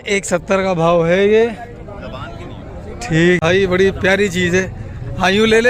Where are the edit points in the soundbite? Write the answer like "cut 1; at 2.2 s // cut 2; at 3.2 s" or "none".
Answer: cut 1; at 3.4 s